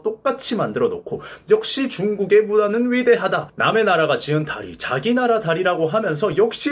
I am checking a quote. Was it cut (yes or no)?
yes